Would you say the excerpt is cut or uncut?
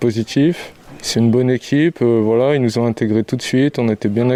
uncut